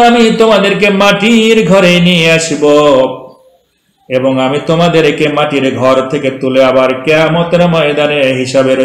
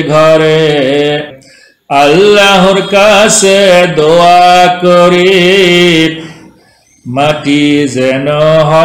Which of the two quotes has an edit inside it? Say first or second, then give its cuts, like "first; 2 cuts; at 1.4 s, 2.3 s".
second; 1 cut; at 1.4 s